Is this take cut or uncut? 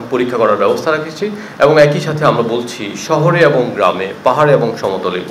uncut